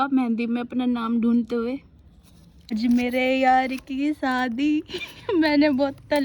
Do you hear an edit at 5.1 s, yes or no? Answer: no